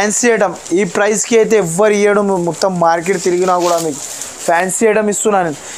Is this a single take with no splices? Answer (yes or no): yes